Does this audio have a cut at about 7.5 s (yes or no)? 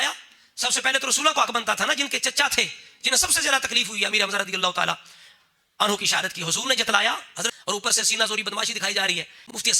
yes